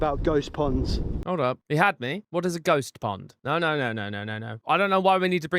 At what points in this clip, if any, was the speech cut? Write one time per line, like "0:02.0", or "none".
0:01.2
0:04.6